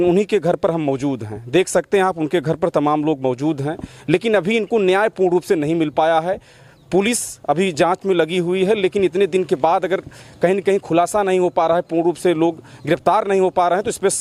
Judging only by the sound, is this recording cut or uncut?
uncut